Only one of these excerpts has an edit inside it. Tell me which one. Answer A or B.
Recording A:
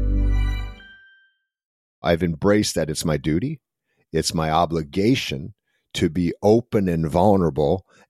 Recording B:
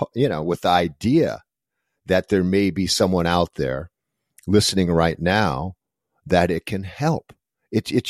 A